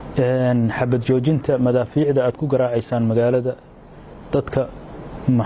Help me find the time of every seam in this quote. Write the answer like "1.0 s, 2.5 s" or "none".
none